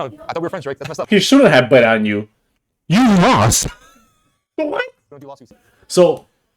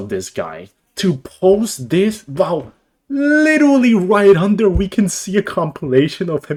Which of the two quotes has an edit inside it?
first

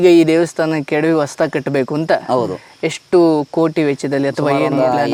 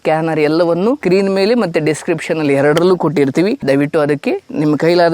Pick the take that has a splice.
second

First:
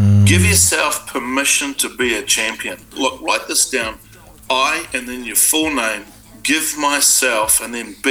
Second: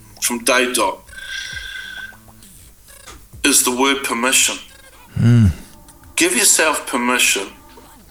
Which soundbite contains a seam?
first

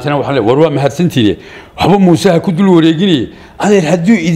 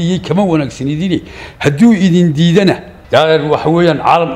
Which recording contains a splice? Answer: second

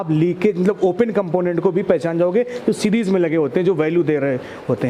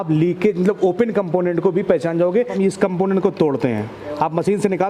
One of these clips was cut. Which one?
second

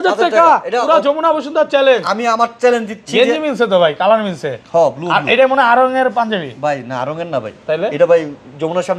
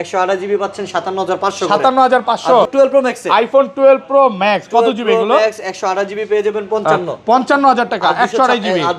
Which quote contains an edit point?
second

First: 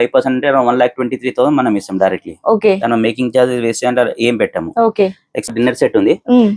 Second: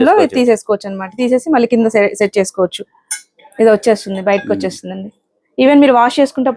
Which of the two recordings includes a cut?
first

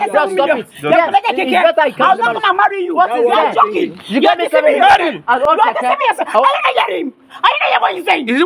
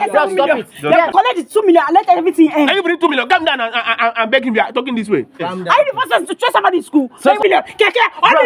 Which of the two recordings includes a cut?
second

